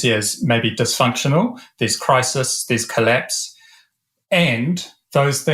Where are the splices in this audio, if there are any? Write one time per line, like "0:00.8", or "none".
none